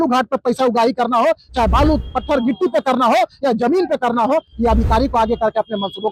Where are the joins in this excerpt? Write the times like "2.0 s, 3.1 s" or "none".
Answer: none